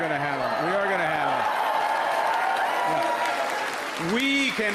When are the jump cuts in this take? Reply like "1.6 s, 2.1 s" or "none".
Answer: none